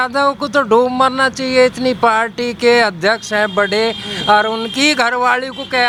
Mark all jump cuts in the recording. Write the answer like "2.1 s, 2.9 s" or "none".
none